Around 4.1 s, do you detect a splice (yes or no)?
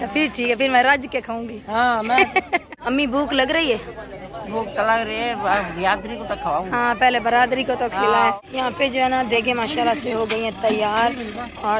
no